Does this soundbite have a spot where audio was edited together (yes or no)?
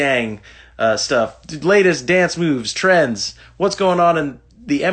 no